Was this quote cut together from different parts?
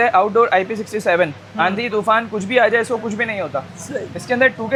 no; 0 cuts

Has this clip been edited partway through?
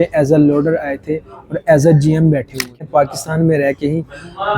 yes; 1 cut; at 2.6 s

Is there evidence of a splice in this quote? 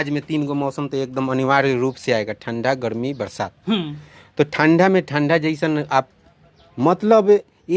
no; 0 cuts

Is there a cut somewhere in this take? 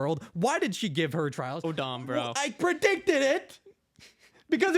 yes; 1 cut; at 1.6 s

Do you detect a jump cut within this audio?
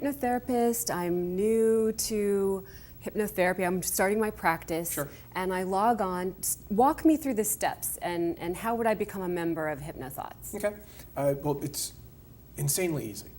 yes; 1 cut; at 11.3 s

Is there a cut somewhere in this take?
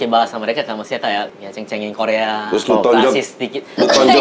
yes; 1 cut; at 1.3 s

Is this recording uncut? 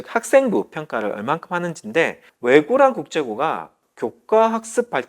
no; 1 cut; at 2.3 s

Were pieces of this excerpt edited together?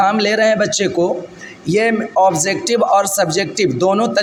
no; 0 cuts

